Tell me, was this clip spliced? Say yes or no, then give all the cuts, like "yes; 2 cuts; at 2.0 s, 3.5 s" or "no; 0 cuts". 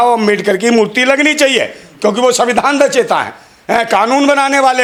no; 0 cuts